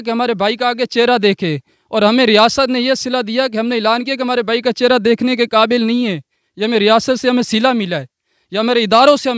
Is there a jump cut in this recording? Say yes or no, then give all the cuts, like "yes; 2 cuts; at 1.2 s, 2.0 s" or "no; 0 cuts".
no; 0 cuts